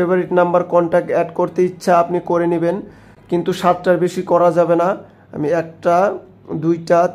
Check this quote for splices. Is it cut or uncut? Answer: uncut